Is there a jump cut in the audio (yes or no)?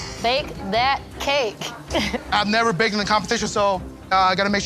no